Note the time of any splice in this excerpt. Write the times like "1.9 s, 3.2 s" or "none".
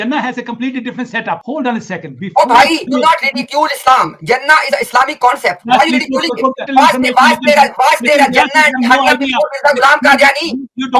2.9 s, 6.6 s